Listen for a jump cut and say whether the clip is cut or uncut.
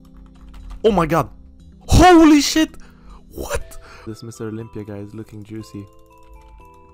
cut